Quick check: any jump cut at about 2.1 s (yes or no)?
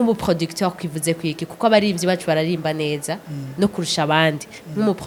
no